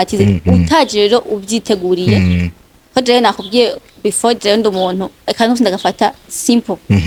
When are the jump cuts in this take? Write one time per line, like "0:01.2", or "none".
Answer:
none